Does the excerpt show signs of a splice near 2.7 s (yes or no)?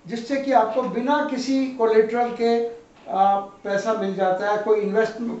no